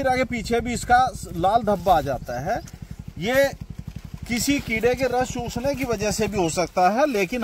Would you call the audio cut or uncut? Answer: uncut